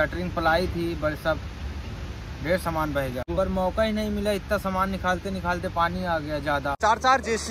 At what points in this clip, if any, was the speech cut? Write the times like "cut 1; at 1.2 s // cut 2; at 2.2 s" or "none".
cut 1; at 3.3 s // cut 2; at 6.8 s